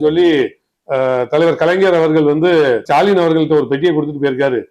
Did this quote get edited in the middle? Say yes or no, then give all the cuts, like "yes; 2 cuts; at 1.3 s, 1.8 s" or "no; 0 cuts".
yes; 1 cut; at 2.8 s